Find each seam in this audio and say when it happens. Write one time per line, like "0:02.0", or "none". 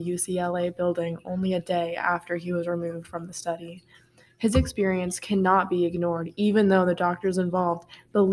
none